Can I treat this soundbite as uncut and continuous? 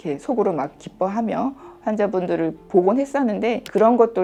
yes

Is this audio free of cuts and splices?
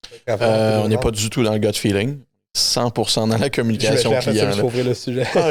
yes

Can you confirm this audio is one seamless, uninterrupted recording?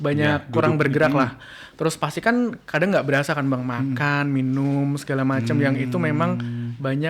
yes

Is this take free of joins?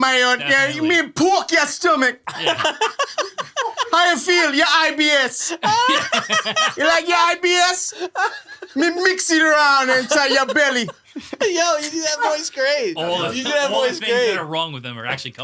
yes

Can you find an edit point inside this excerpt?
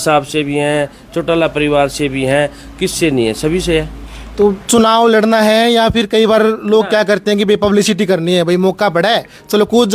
no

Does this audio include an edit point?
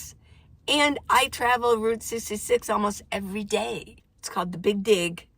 yes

